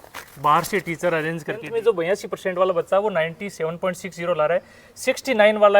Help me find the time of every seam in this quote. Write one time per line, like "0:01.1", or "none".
0:01.6